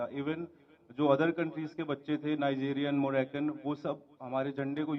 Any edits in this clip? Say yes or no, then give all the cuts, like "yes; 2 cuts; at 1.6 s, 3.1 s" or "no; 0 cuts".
no; 0 cuts